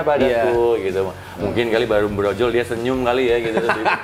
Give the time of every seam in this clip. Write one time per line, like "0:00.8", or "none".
none